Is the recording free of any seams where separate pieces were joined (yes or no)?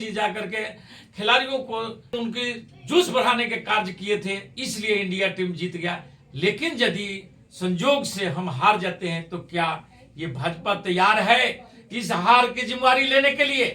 no